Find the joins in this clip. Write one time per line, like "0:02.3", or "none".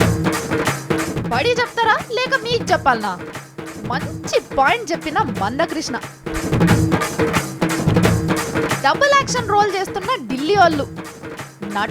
0:00.9